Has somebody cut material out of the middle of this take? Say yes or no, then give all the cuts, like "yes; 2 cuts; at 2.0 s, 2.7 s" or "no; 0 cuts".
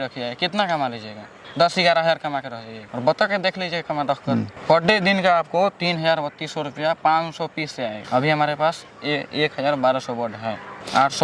no; 0 cuts